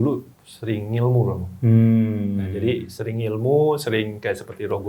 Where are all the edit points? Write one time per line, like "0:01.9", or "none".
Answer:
0:01.7